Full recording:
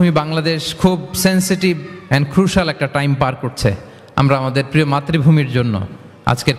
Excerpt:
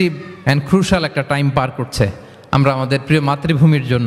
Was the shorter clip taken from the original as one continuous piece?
yes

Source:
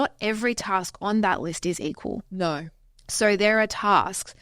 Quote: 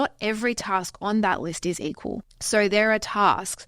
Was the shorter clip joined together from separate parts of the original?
yes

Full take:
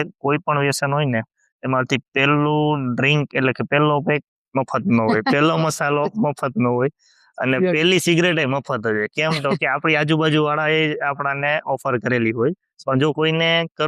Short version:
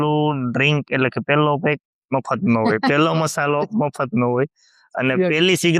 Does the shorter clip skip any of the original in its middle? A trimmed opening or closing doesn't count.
no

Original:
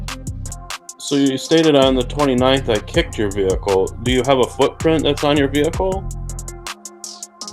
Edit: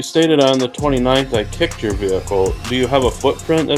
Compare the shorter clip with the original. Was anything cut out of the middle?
no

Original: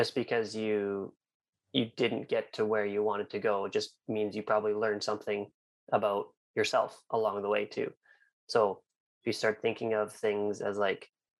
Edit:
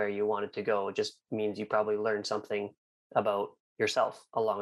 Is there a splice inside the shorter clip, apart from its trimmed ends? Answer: no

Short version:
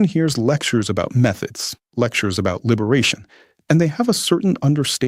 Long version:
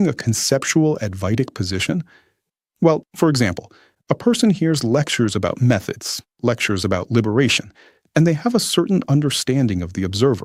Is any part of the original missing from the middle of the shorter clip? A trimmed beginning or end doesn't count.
no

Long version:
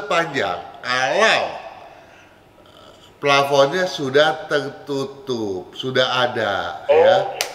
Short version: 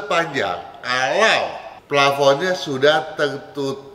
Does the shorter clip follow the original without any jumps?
no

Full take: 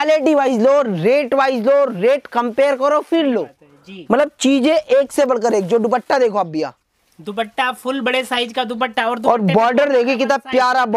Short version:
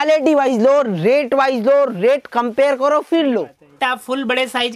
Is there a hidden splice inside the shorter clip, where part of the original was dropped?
yes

